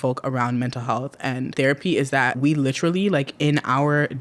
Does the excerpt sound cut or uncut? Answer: cut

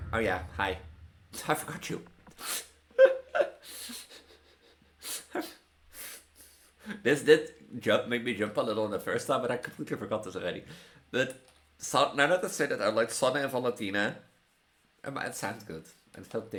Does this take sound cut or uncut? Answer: uncut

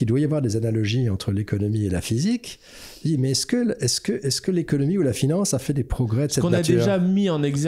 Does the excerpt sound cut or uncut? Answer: uncut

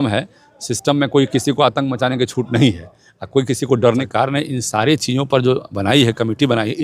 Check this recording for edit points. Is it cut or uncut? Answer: cut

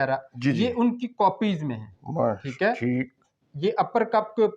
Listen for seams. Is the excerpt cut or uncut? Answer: uncut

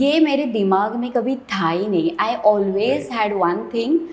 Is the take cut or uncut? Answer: uncut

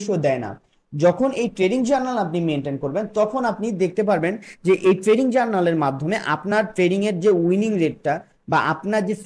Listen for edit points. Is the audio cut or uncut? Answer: uncut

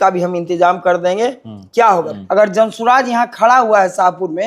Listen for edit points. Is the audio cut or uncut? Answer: cut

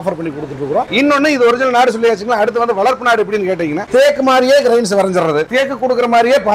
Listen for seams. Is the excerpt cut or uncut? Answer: uncut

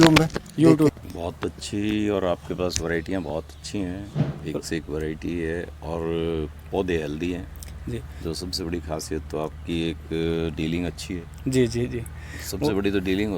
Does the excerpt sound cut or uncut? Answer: cut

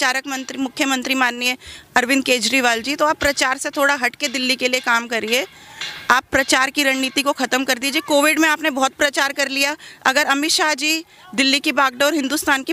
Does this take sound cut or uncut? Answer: uncut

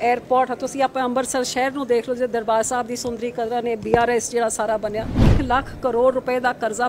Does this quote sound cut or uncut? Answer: cut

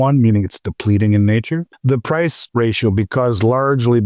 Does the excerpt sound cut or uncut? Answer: cut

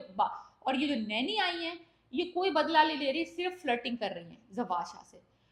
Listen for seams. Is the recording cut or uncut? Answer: uncut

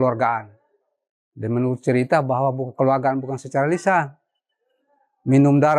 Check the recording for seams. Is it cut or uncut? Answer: uncut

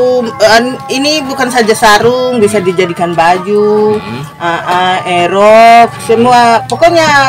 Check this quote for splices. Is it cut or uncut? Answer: uncut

